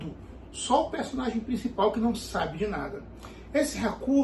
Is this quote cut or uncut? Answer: uncut